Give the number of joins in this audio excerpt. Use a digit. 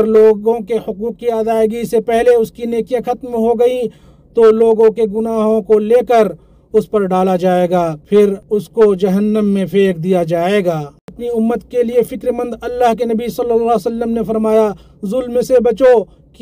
1